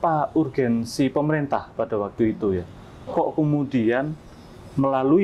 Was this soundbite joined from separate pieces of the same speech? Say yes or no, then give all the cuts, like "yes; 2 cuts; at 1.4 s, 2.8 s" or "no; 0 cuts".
no; 0 cuts